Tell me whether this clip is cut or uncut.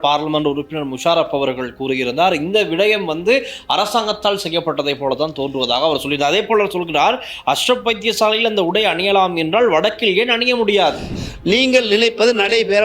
cut